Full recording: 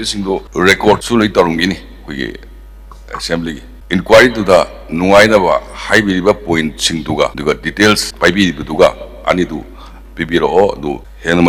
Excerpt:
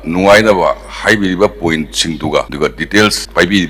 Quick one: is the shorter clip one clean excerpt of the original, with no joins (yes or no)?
yes